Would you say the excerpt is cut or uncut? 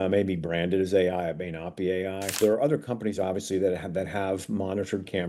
cut